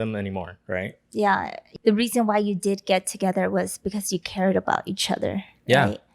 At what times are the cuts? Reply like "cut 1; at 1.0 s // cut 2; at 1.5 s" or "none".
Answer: cut 1; at 1.6 s